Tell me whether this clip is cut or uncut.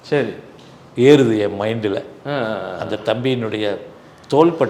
uncut